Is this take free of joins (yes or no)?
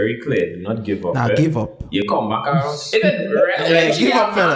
no